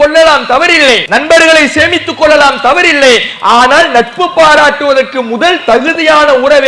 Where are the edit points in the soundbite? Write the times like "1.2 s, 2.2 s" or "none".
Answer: 1.0 s